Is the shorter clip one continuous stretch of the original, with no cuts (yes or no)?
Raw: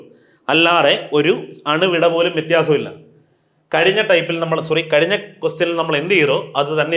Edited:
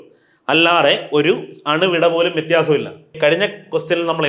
no